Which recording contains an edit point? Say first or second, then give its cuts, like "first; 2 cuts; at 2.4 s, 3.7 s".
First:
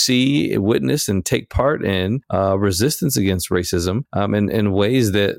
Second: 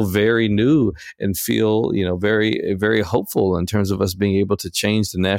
first; 2 cuts; at 2.2 s, 4.1 s